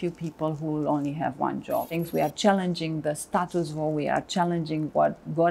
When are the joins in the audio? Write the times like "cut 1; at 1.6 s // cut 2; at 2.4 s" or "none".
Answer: cut 1; at 2.0 s